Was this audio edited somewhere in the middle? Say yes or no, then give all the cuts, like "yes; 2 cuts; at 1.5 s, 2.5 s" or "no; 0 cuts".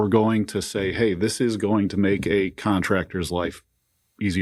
no; 0 cuts